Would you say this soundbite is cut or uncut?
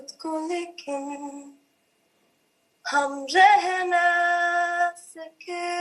uncut